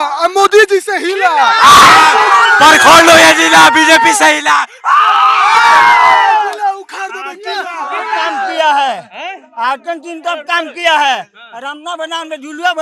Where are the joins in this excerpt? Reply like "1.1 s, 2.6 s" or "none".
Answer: none

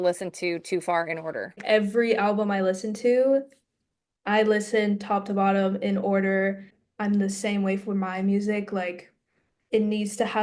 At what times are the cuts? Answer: 1.6 s, 6.8 s

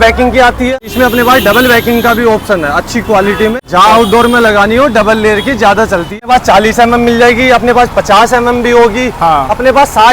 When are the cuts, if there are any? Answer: 0.8 s, 3.5 s, 6.2 s

